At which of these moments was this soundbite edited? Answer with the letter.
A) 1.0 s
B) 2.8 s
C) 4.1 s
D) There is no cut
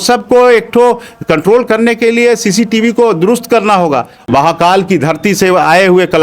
C